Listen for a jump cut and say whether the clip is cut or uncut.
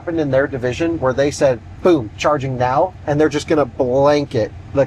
uncut